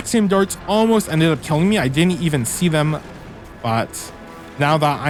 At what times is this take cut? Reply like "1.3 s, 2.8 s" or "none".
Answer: none